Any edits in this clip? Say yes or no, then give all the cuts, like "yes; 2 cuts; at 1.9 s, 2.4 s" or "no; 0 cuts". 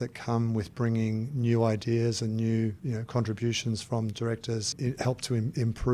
yes; 2 cuts; at 2.8 s, 4.7 s